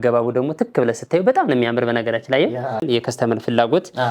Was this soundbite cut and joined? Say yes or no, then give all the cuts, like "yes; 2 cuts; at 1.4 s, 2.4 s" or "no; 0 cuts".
yes; 1 cut; at 2.8 s